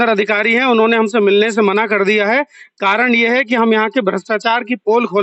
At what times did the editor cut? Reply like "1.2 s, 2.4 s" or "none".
none